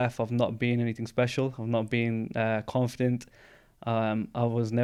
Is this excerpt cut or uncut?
uncut